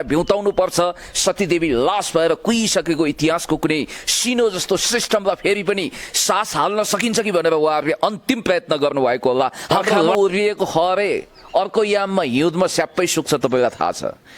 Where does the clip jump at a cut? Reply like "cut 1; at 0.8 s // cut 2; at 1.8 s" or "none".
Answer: cut 1; at 10.1 s